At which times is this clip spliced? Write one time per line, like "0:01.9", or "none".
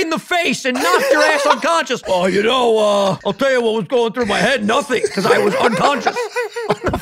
0:02.1
0:03.2